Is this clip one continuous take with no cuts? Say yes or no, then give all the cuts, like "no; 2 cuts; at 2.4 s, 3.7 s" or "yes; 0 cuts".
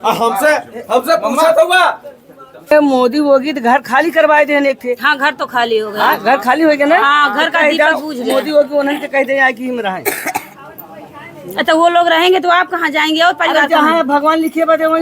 no; 1 cut; at 2.7 s